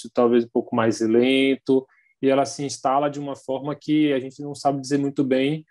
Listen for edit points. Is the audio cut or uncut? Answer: uncut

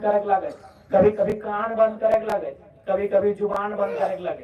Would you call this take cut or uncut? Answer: uncut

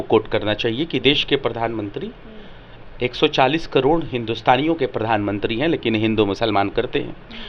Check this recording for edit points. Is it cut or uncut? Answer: uncut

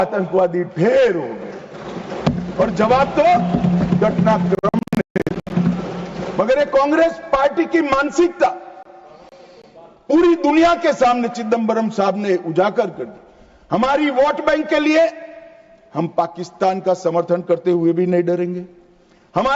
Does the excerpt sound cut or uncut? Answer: uncut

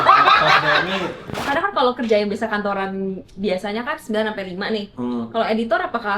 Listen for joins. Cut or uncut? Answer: cut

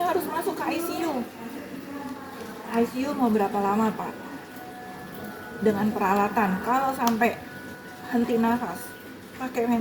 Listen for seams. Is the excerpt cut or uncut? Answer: uncut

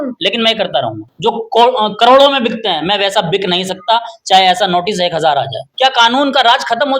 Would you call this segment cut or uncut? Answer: cut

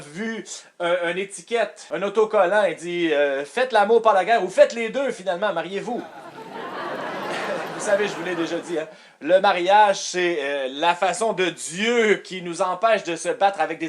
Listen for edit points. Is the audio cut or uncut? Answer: cut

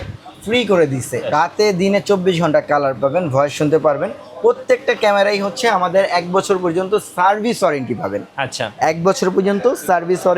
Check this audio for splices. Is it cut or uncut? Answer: cut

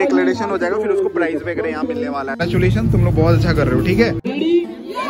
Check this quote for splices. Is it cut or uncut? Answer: cut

